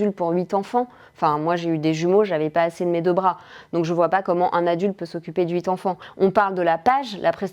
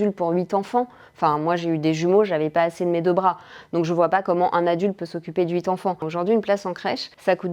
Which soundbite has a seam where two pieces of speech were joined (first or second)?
second